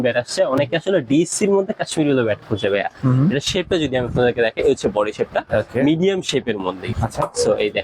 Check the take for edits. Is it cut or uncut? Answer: cut